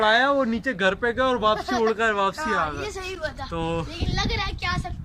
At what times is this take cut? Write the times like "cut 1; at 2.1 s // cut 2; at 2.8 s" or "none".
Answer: none